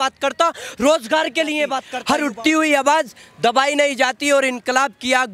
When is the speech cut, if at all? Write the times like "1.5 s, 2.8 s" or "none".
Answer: 1.9 s